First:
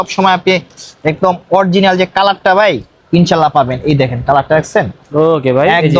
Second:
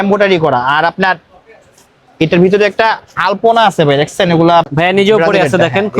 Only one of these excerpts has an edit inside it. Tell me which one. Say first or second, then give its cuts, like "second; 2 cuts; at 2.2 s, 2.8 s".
second; 1 cut; at 4.7 s